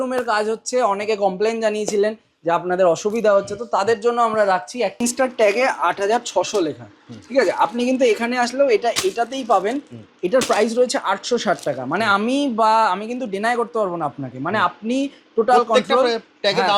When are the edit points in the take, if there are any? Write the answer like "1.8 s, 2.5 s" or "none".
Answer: 5.0 s